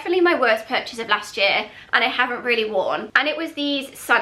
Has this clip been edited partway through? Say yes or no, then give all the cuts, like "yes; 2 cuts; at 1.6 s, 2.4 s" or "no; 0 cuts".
no; 0 cuts